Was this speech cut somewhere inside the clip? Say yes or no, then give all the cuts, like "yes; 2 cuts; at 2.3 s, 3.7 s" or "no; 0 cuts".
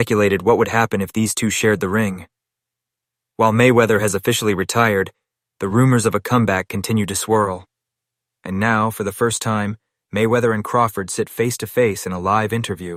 no; 0 cuts